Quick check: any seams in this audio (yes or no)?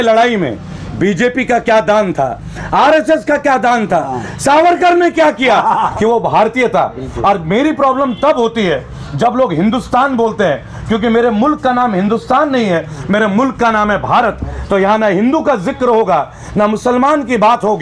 yes